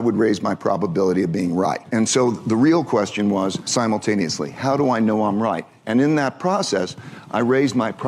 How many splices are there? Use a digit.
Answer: 2